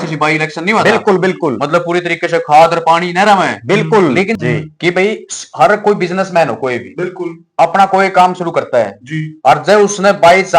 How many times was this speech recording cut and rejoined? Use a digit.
1